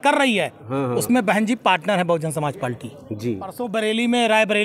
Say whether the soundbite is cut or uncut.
cut